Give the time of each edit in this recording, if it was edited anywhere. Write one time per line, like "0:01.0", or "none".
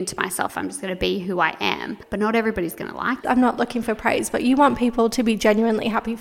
0:02.0
0:03.2